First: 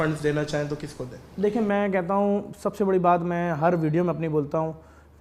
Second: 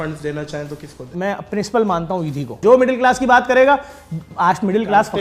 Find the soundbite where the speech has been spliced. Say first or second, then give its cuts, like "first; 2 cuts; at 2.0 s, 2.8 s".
second; 2 cuts; at 1.1 s, 2.6 s